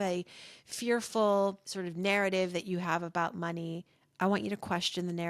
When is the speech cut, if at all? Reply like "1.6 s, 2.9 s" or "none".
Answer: 1.7 s